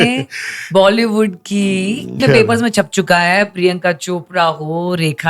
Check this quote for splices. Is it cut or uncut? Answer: cut